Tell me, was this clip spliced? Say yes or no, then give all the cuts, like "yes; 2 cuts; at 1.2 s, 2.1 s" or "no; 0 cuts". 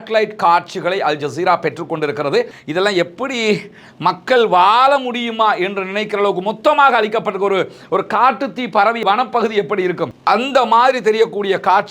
yes; 1 cut; at 2.6 s